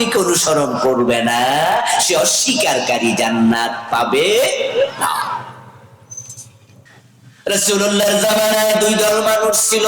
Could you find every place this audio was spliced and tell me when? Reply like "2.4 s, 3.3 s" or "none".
6.9 s